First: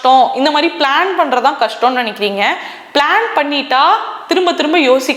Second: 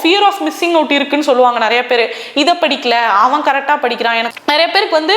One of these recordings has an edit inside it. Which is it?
second; 1 cut; at 4.2 s

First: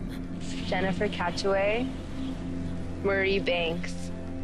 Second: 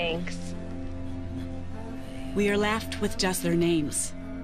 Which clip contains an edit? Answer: second; 1 cut; at 2.4 s

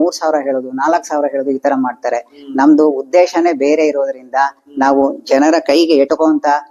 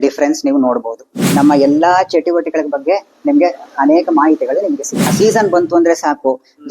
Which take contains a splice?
second; 2 cuts; at 1.2 s, 5.0 s

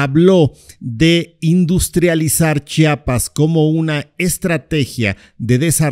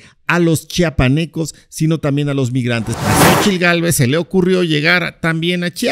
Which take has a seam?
second; 1 cut; at 2.9 s

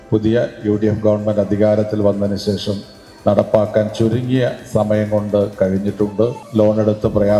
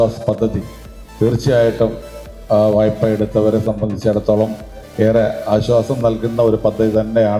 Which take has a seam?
first; 1 cut; at 6.4 s

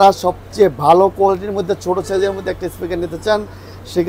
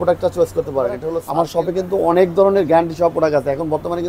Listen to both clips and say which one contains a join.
second; 1 cut; at 1.2 s

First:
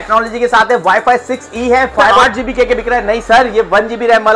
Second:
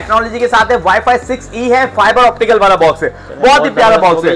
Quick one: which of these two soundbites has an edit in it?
first; 1 cut; at 2.1 s

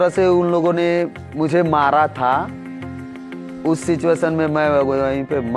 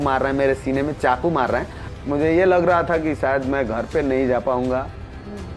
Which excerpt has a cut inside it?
second; 1 cut; at 1.8 s

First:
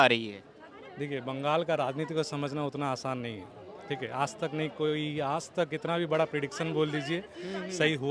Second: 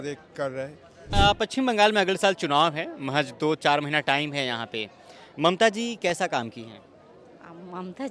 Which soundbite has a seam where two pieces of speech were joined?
second; 1 cut; at 1.1 s

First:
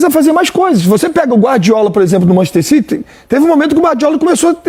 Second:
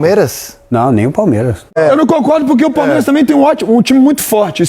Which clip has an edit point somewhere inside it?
second; 1 cut; at 1.8 s

